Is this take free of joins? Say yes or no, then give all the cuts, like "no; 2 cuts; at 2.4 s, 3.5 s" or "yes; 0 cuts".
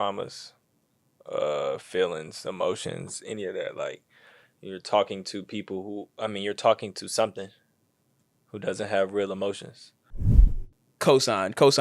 no; 1 cut; at 10.4 s